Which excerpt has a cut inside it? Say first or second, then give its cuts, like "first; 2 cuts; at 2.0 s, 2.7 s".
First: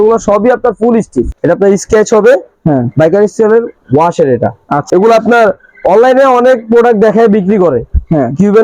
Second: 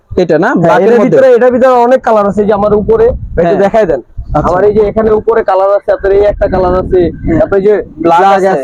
first; 2 cuts; at 1.2 s, 4.8 s